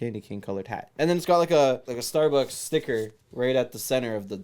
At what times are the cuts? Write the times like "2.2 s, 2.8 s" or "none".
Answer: 0.9 s, 1.9 s